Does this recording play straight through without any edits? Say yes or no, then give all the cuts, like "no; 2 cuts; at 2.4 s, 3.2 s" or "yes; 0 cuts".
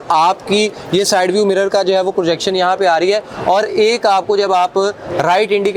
yes; 0 cuts